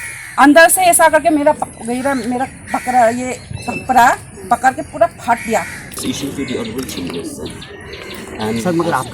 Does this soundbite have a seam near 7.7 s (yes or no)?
no